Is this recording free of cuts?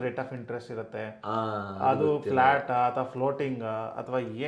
yes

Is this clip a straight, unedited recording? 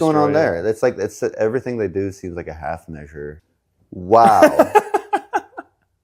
no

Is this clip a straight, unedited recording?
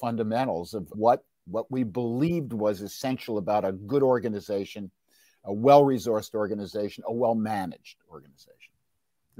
yes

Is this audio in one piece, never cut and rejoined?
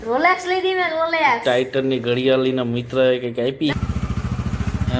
no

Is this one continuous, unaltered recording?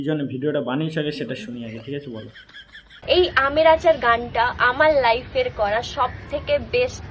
yes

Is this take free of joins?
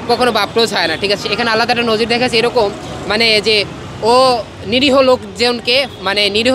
yes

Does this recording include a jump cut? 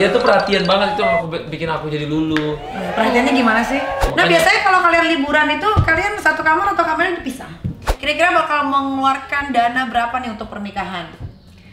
yes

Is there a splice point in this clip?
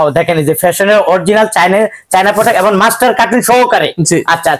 no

